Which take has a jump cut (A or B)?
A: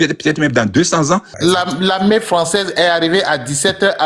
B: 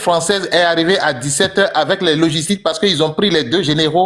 A